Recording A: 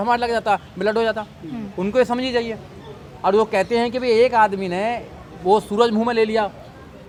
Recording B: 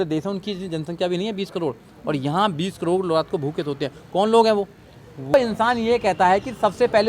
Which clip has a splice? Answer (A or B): B